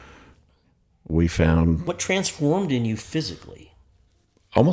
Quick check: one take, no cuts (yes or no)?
no